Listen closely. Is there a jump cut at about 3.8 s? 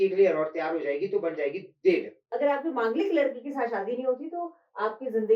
no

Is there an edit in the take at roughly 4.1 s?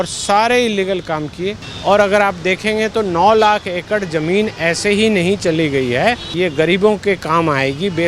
no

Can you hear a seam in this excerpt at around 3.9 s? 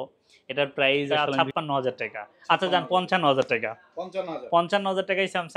no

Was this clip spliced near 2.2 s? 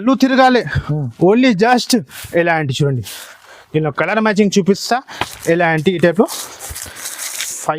yes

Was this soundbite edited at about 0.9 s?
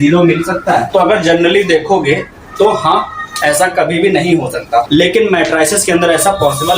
yes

